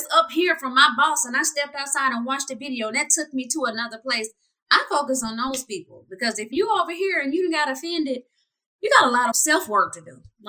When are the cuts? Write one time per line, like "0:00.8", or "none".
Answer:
0:06.5
0:09.4